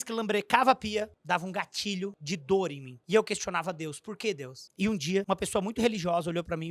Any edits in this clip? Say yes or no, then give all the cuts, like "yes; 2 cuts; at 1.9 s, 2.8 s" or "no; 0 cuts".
yes; 4 cuts; at 1.2 s, 2.4 s, 4.6 s, 5.2 s